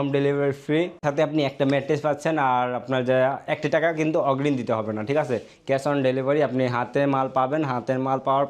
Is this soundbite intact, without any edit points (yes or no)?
yes